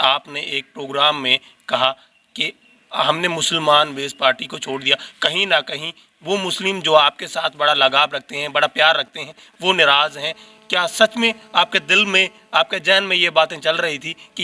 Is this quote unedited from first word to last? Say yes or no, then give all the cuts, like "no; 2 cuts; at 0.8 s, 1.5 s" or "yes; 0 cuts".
yes; 0 cuts